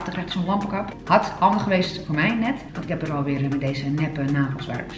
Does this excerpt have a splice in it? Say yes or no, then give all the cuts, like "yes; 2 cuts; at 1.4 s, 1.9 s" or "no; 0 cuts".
yes; 1 cut; at 2.7 s